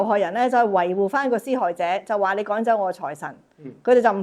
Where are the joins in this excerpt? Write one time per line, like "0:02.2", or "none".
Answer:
none